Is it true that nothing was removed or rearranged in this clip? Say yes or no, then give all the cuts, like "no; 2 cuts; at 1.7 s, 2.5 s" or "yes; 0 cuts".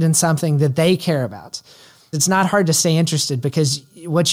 yes; 0 cuts